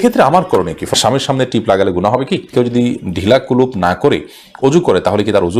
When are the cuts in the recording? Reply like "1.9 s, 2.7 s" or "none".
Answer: 0.9 s, 2.5 s